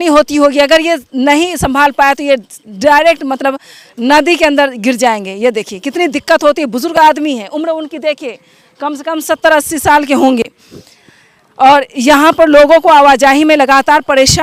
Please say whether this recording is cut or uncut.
uncut